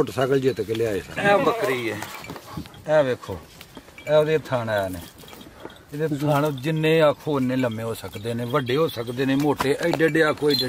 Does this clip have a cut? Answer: yes; 1 cut; at 1.1 s

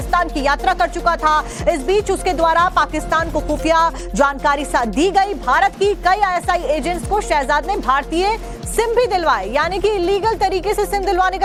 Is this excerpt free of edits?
yes; 0 cuts

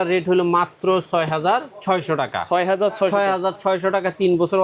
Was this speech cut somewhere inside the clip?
no; 0 cuts

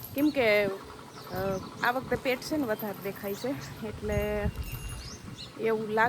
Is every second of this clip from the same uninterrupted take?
yes; 0 cuts

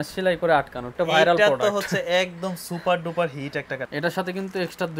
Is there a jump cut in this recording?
yes; 2 cuts; at 0.9 s, 3.8 s

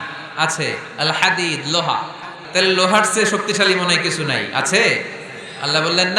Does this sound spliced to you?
yes; 1 cut; at 2.4 s

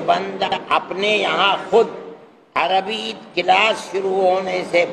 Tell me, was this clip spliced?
no; 0 cuts

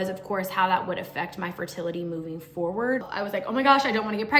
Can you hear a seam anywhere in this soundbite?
yes; 1 cut; at 3.0 s

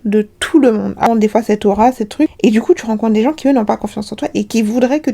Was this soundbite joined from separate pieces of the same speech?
yes; 1 cut; at 1.1 s

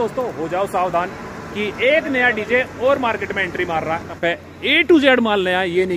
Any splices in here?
yes; 1 cut; at 4.2 s

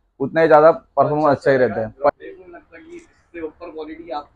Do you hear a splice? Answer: yes; 1 cut; at 2.1 s

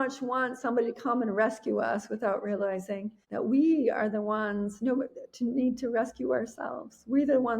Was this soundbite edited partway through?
yes; 1 cut; at 3.2 s

